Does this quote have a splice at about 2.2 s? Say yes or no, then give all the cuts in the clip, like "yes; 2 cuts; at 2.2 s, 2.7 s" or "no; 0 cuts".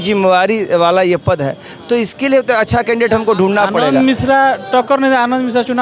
no; 1 cut; at 3.8 s